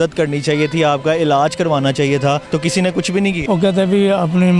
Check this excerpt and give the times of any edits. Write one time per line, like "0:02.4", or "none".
0:02.4
0:03.4